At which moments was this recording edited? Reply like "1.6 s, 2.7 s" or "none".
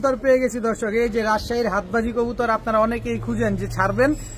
none